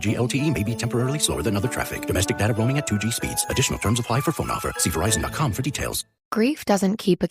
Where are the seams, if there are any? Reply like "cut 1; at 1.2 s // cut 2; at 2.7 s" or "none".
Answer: cut 1; at 6.2 s